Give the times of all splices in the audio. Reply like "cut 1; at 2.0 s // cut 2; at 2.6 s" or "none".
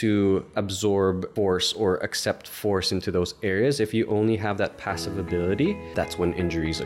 cut 1; at 0.9 s // cut 2; at 5.9 s